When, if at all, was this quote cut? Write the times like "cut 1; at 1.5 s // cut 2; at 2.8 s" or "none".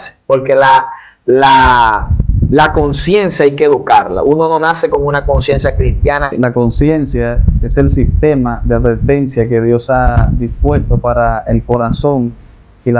cut 1; at 6.3 s